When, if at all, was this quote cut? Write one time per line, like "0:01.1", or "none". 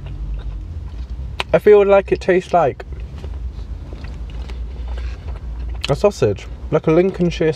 none